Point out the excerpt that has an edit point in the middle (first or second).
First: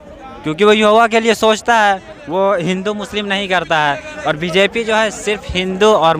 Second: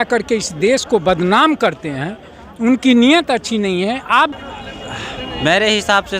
second